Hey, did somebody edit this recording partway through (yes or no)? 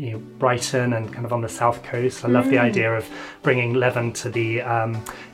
no